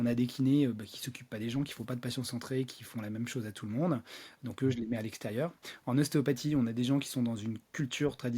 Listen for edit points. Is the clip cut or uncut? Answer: uncut